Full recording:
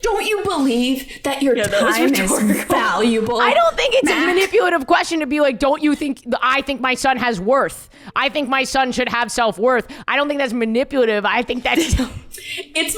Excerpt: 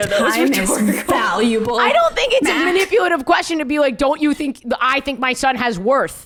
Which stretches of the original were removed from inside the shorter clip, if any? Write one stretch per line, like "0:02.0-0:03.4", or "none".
none